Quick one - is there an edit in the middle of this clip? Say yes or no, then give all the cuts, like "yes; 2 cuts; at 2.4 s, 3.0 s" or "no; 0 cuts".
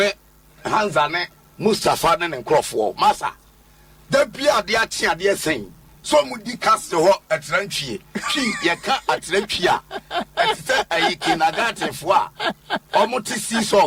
no; 0 cuts